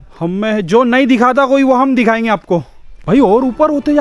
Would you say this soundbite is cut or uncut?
cut